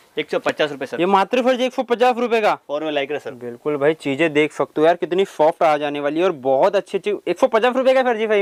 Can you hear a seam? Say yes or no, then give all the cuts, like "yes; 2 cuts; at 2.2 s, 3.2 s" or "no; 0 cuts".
no; 0 cuts